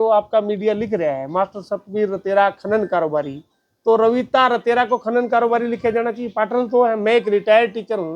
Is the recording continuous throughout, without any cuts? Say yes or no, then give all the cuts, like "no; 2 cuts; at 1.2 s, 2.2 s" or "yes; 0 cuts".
yes; 0 cuts